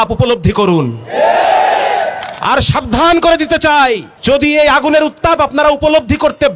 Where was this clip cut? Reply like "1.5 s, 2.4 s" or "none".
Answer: 4.1 s

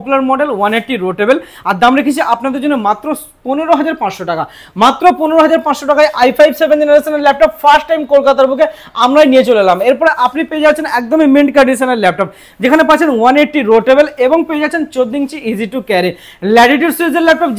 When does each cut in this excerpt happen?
none

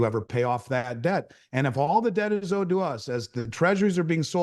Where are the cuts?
none

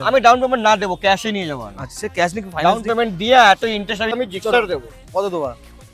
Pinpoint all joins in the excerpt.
4.1 s

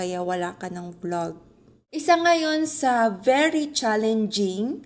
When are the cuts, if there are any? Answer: 2.0 s

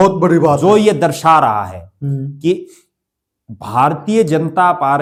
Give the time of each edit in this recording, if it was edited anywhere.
none

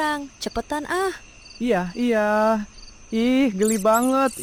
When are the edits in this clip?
none

